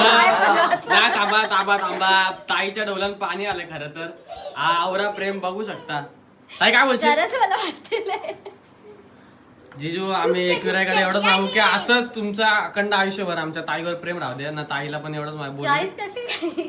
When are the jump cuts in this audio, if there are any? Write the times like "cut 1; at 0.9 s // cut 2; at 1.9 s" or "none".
none